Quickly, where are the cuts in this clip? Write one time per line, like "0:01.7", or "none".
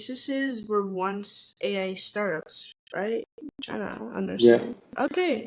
none